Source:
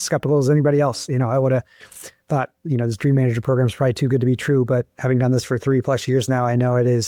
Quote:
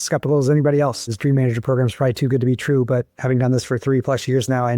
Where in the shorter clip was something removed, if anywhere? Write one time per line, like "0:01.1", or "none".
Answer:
0:01.1